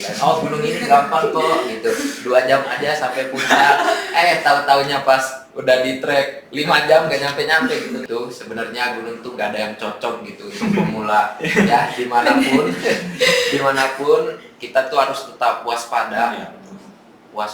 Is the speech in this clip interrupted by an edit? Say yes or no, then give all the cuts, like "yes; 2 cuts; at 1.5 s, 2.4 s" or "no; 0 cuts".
yes; 1 cut; at 8.0 s